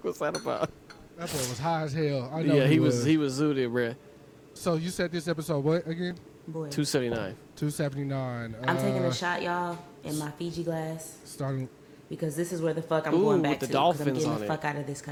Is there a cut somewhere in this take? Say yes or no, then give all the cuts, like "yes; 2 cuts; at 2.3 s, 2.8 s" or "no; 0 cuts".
no; 0 cuts